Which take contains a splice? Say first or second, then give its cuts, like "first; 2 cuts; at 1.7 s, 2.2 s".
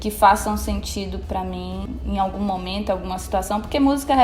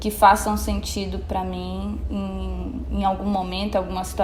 first; 1 cut; at 1.8 s